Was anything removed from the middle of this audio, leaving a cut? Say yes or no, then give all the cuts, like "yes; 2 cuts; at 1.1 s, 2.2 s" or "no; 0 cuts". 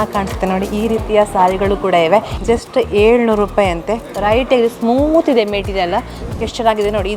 yes; 2 cuts; at 2.3 s, 6.2 s